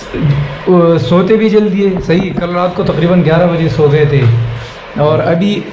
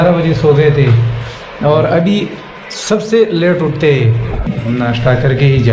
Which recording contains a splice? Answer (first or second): second